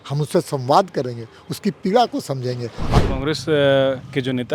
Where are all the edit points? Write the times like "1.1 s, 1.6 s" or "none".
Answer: 3.0 s